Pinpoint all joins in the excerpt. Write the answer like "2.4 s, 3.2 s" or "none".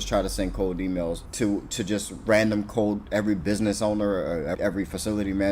1.2 s, 4.6 s